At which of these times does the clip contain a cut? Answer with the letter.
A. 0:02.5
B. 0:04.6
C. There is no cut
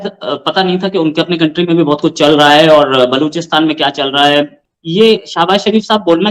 B